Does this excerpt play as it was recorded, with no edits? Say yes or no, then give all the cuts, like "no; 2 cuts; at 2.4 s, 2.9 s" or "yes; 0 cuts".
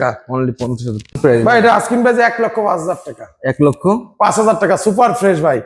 no; 1 cut; at 1.2 s